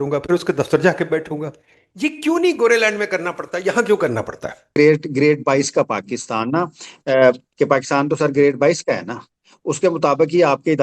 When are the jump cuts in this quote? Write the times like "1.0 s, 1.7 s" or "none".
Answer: 4.8 s